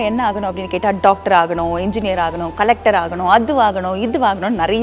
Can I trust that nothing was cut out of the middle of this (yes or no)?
yes